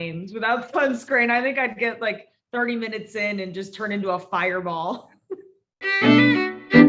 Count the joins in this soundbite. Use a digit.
1